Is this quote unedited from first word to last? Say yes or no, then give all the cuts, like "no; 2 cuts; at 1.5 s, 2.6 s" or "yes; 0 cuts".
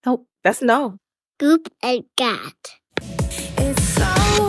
no; 1 cut; at 1.0 s